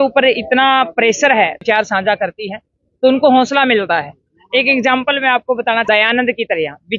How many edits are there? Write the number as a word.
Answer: two